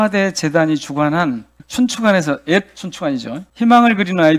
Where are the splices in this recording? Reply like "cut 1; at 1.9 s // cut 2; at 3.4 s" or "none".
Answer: cut 1; at 1.6 s // cut 2; at 3.4 s